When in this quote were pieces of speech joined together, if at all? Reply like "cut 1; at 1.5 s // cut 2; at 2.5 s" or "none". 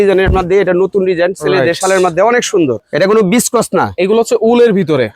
cut 1; at 2.8 s